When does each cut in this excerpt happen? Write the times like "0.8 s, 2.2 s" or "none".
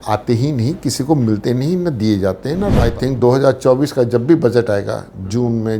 2.9 s

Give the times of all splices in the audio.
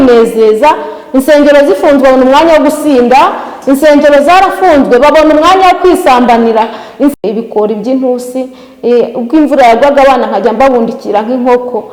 7.3 s

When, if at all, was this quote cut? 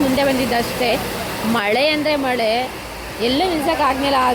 none

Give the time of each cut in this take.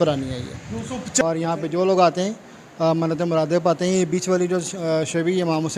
1.2 s

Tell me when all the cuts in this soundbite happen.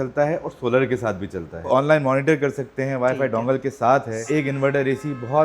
1.7 s, 4.2 s

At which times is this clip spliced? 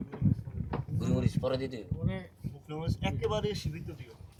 none

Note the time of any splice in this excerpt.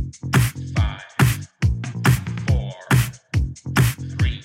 2.4 s

